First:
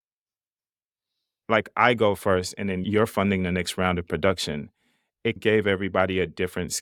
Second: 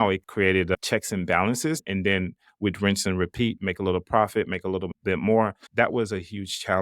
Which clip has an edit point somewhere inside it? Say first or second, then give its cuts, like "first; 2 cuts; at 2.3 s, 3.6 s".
second; 2 cuts; at 1.8 s, 5.6 s